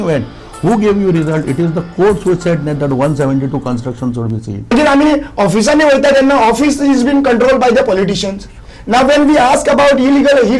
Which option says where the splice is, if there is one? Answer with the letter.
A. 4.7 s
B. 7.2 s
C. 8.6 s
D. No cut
A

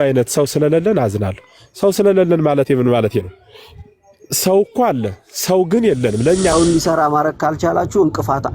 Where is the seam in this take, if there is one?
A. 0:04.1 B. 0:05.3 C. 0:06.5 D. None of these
C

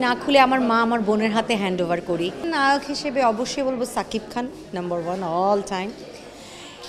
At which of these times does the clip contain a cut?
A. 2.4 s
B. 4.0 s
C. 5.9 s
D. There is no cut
A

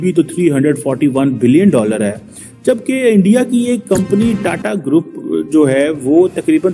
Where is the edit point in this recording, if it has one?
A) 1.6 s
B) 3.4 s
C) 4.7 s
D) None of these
D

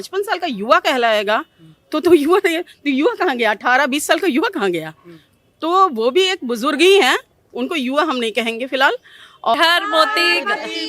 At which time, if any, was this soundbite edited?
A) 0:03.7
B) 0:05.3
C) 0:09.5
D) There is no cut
C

